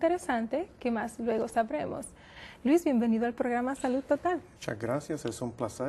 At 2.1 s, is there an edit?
no; 1 cut; at 4.4 s

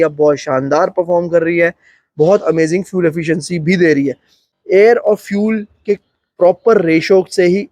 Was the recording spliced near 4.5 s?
yes; 1 cut; at 4.5 s

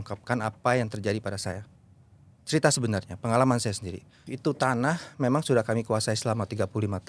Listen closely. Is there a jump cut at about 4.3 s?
yes; 1 cut; at 4.3 s

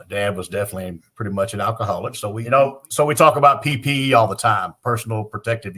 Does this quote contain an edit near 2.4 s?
yes; 1 cut; at 2.4 s

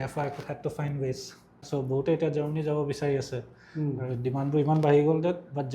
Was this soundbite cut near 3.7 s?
no; 1 cut; at 1.6 s

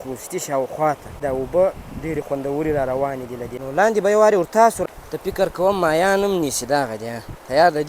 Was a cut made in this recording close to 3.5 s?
yes; 3 cuts; at 1.2 s, 3.5 s, 4.8 s

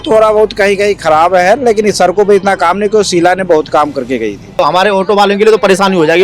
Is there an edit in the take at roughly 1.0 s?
no; 1 cut; at 4.4 s

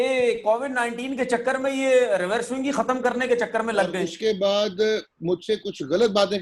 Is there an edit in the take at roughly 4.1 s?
yes; 1 cut; at 4.1 s

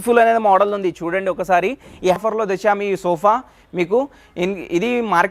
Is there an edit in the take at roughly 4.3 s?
no; 1 cut; at 2.2 s

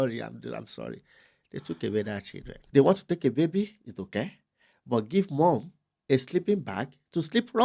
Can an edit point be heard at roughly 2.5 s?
yes; 1 cut; at 2.5 s

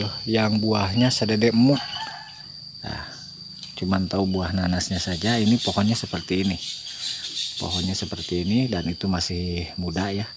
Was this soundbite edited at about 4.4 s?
no; 1 cut; at 2.2 s

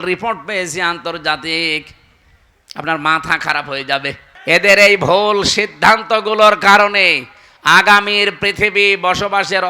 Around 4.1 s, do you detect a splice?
yes; 1 cut; at 4.1 s

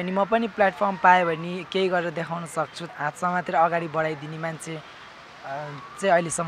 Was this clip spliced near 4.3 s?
no; 1 cut; at 2.8 s

